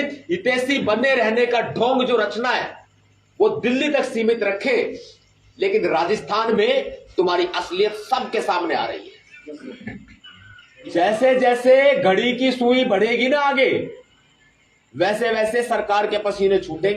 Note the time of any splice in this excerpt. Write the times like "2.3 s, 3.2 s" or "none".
9.4 s

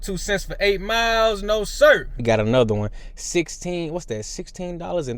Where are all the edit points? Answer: 2.2 s

